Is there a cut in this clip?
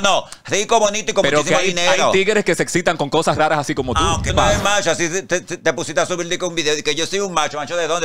yes; 1 cut; at 4.3 s

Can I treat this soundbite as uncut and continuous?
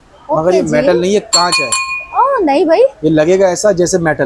yes; 0 cuts

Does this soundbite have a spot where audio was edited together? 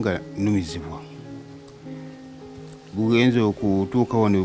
yes; 2 cuts; at 1.2 s, 2.9 s

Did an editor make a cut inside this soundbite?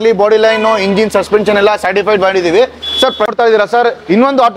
yes; 1 cut; at 3.3 s

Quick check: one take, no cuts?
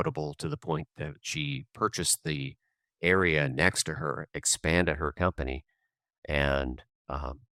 yes; 0 cuts

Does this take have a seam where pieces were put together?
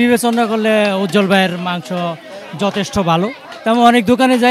no; 0 cuts

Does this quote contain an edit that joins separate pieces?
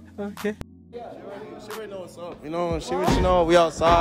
yes; 1 cut; at 0.9 s

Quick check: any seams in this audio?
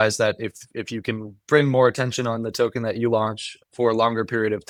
no; 0 cuts

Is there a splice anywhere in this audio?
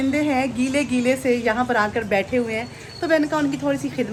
no; 0 cuts

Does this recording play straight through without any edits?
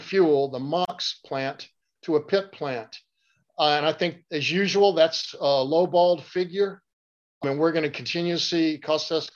yes; 0 cuts

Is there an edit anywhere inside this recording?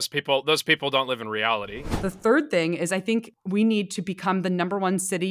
yes; 2 cuts; at 1.8 s, 3.3 s

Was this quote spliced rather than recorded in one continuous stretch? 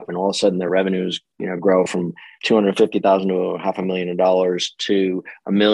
yes; 1 cut; at 2.3 s

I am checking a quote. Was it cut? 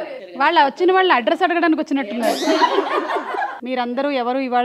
yes; 1 cut; at 3.6 s

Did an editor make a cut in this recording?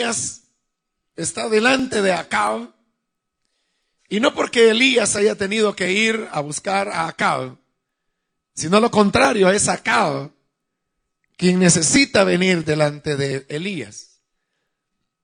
no; 0 cuts

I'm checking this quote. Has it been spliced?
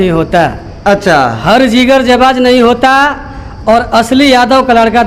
no; 0 cuts

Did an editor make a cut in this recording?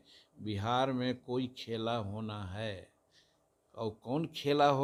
no; 0 cuts

